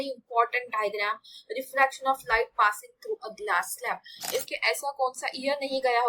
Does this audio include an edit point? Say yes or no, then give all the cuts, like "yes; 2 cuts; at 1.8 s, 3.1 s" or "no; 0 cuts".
yes; 1 cut; at 4.5 s